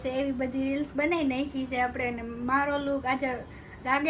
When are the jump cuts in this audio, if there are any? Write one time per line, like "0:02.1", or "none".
none